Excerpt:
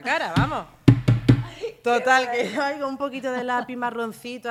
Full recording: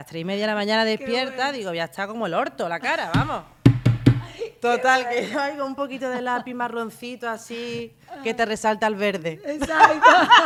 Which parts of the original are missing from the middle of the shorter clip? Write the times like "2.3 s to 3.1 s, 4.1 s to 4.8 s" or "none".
none